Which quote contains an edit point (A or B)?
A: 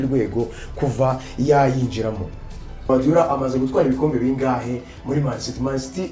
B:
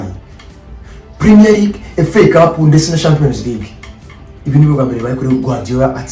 A